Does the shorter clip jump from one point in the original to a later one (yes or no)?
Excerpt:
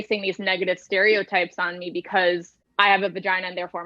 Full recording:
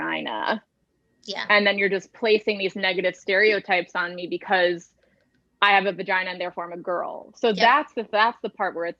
yes